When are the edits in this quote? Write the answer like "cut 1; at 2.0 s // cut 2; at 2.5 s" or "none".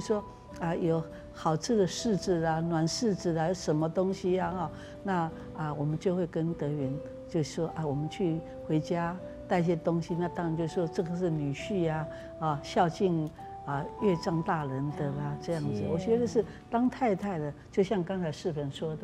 none